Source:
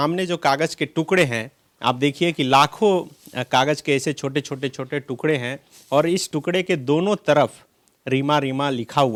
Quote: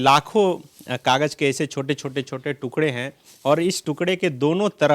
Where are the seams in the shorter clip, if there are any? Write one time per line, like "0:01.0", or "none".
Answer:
none